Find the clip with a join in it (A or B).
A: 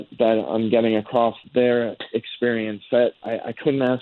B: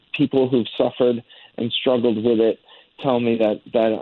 A